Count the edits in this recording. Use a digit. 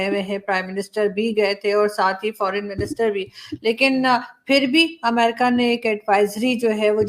0